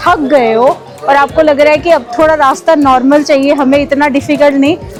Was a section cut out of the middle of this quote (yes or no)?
no